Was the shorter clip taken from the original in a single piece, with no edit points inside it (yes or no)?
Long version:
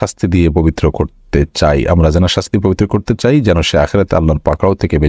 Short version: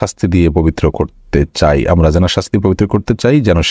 yes